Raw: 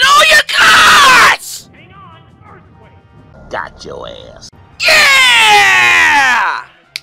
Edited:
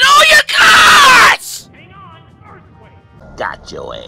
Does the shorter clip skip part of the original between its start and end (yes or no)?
yes